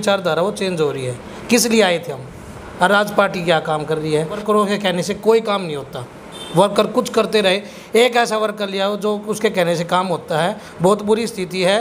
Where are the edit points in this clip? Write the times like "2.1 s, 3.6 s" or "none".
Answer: 4.4 s, 10.7 s